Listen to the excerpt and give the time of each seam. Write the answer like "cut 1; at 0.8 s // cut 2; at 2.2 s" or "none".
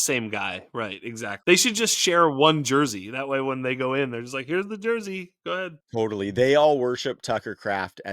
cut 1; at 1.1 s

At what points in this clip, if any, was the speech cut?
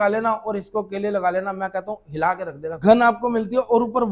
cut 1; at 2.8 s

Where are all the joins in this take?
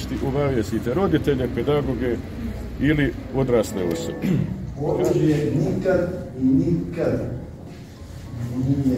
cut 1; at 4.1 s

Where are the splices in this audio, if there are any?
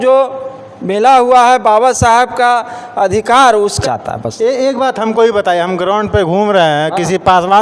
cut 1; at 3.8 s

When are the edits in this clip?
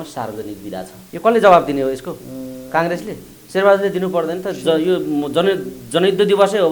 cut 1; at 1.0 s // cut 2; at 3.3 s

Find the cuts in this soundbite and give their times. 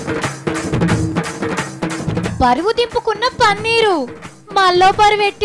cut 1; at 1.0 s

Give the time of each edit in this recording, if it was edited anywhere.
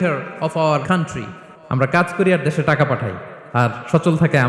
cut 1; at 1.0 s

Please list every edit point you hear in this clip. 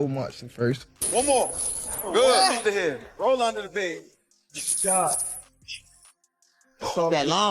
cut 1; at 1.1 s

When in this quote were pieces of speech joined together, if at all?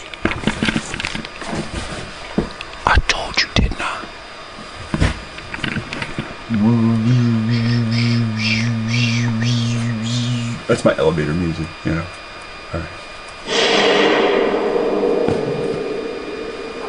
none

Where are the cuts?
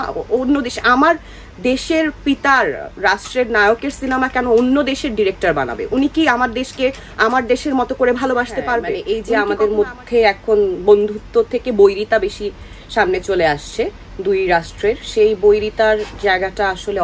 cut 1; at 8.9 s

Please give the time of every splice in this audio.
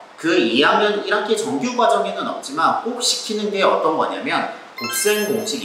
none

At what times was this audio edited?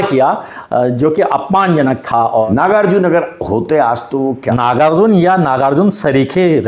cut 1; at 2.5 s // cut 2; at 4.4 s

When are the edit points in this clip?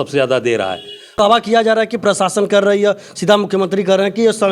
cut 1; at 1.1 s

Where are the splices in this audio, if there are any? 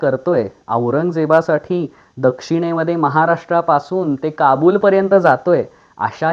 none

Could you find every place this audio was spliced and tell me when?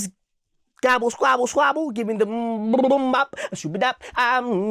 none

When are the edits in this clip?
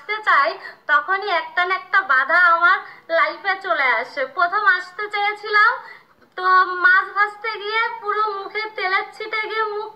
none

